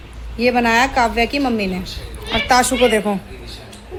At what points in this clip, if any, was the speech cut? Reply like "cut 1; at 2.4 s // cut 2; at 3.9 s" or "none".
none